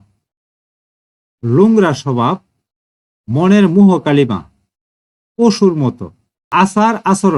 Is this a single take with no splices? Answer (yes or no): no